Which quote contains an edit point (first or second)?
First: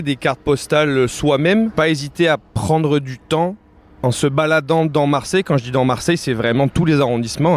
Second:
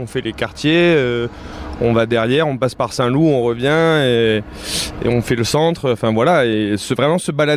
first